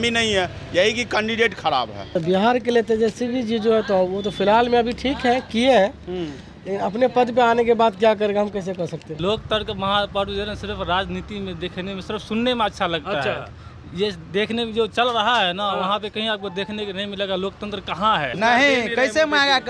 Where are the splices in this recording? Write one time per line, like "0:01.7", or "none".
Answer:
0:02.1
0:09.1
0:18.3